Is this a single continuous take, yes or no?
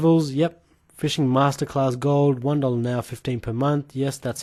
yes